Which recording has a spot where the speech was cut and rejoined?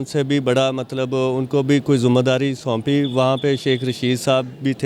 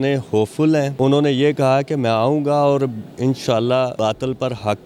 second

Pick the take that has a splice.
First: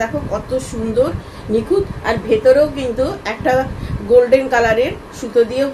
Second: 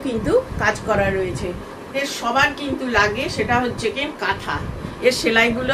second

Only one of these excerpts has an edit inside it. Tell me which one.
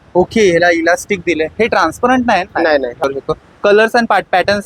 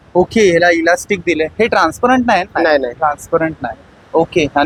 first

